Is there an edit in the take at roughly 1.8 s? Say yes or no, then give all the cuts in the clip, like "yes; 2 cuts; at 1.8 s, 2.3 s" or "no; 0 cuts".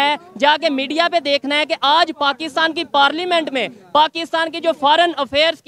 no; 0 cuts